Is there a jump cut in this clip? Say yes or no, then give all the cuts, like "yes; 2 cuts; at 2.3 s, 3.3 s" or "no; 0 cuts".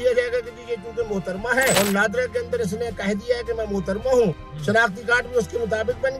yes; 1 cut; at 1.8 s